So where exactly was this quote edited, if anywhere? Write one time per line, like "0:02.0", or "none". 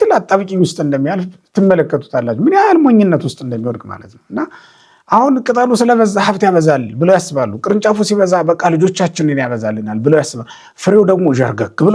none